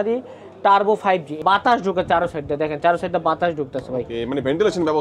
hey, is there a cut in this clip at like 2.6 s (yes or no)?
no